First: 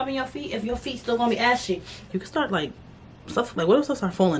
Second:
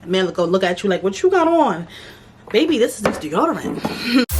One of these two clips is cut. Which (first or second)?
first